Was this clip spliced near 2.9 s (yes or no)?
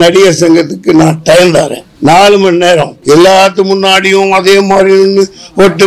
yes